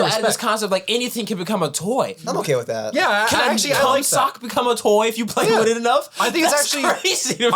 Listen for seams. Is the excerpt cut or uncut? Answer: cut